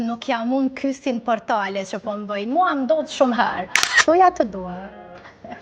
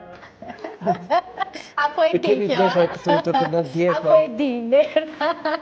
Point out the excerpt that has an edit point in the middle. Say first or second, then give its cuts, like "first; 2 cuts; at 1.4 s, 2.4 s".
first; 1 cut; at 4.0 s